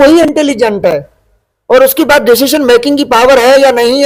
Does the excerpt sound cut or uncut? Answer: uncut